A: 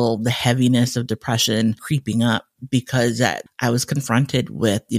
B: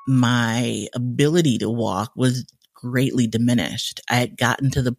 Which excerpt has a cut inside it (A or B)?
A